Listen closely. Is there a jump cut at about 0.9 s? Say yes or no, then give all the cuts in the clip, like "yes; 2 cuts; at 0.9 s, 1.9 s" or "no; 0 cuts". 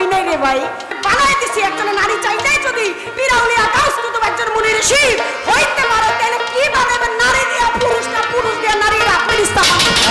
yes; 1 cut; at 0.9 s